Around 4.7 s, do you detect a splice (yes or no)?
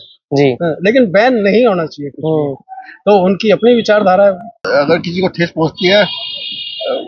yes